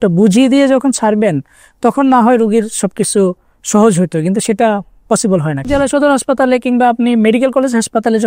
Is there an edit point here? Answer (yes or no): yes